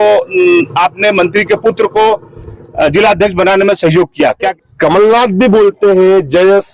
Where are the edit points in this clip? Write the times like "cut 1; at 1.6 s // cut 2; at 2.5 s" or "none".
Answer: cut 1; at 4.6 s